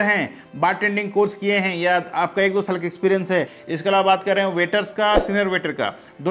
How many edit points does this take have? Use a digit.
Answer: 1